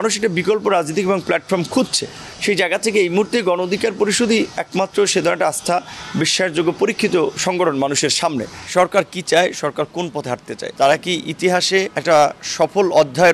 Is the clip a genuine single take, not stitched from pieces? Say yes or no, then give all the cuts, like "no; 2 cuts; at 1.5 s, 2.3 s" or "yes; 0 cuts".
no; 3 cuts; at 8.5 s, 10.6 s, 11.9 s